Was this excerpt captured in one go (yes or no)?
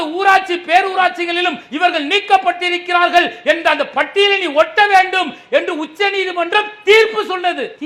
yes